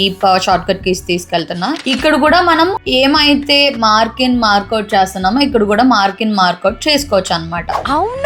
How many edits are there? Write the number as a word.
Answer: zero